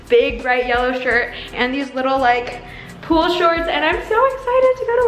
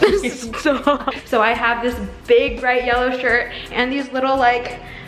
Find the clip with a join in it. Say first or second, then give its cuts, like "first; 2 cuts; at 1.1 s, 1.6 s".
second; 1 cut; at 1.2 s